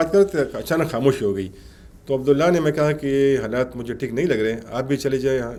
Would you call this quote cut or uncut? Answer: uncut